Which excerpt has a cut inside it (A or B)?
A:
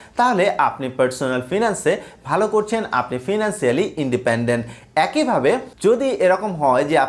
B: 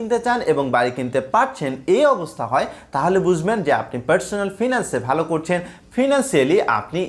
A